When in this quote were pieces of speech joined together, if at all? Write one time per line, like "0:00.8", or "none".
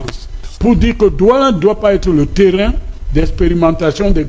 none